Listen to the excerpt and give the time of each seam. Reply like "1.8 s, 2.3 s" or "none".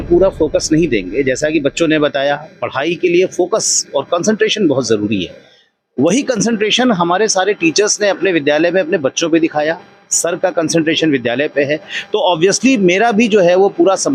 none